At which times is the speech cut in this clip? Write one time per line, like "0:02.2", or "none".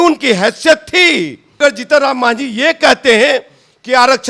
0:01.6